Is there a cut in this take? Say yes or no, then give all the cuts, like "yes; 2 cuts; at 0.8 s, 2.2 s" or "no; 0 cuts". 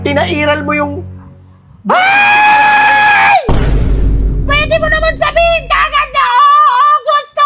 no; 0 cuts